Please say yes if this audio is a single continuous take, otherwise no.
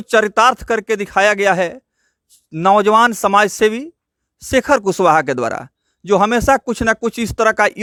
yes